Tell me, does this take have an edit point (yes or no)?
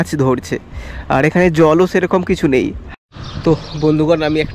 yes